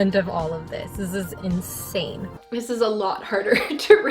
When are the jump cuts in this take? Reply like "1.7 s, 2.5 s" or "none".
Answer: 2.4 s

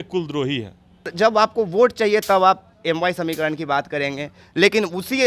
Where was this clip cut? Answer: 1.1 s

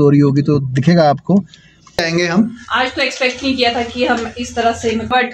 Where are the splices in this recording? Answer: 2.0 s

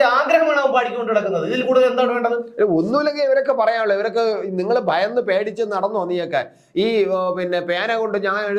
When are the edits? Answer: none

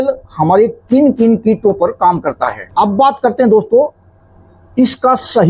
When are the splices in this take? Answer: 2.5 s

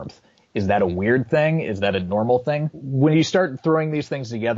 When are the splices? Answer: 2.8 s

